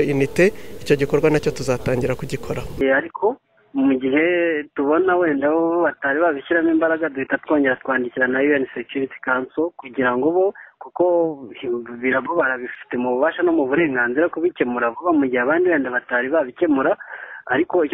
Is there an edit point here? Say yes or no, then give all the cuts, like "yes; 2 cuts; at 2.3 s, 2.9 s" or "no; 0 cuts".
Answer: yes; 1 cut; at 2.8 s